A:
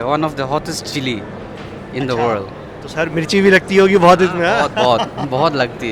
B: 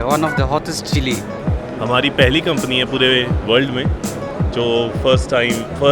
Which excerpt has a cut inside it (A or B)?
B